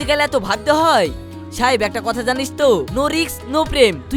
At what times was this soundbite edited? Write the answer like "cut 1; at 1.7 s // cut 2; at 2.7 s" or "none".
none